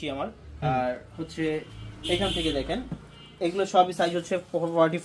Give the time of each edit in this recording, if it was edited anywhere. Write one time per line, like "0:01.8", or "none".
none